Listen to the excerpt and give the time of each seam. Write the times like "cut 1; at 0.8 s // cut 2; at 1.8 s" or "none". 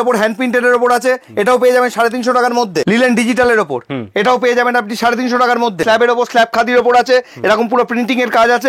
cut 1; at 2.8 s // cut 2; at 5.8 s